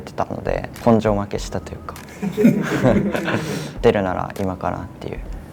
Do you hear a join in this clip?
yes; 1 cut; at 3.7 s

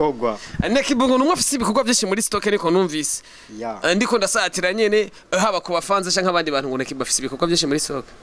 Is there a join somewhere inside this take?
no; 0 cuts

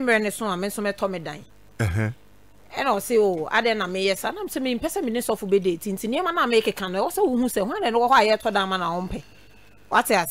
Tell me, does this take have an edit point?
no; 0 cuts

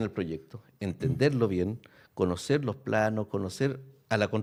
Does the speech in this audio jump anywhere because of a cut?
no; 0 cuts

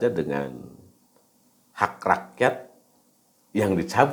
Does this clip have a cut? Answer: no; 0 cuts

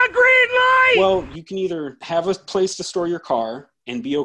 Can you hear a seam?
yes; 2 cuts; at 1.0 s, 2.0 s

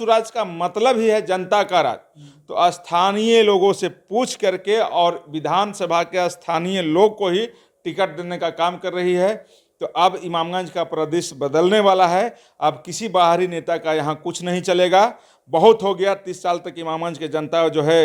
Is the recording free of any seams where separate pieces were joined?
yes; 0 cuts

